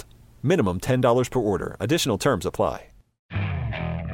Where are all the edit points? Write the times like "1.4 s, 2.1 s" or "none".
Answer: 3.2 s